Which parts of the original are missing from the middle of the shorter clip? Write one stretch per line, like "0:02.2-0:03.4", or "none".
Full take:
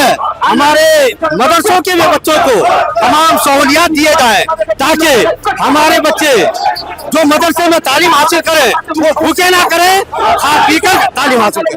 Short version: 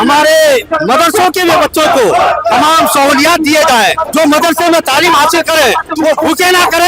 0:04.5-0:07.0